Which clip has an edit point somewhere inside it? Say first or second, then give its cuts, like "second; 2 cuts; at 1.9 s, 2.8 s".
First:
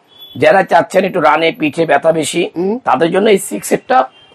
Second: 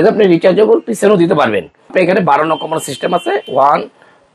second; 1 cut; at 1.9 s